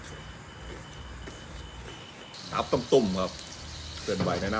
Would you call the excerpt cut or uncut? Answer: cut